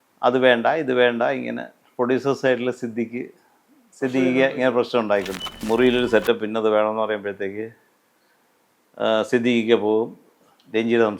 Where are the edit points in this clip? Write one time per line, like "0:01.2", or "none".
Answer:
0:05.6